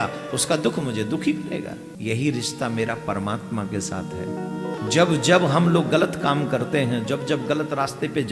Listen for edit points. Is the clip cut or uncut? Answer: cut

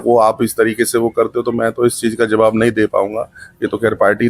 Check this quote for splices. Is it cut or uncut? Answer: uncut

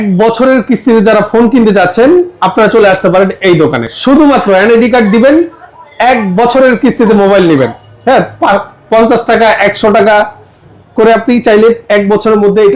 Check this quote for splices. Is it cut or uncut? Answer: uncut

